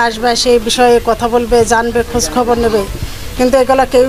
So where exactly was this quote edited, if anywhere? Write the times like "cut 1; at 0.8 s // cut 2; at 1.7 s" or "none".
none